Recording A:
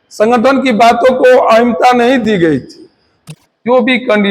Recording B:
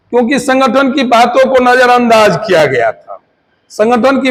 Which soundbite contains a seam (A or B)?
A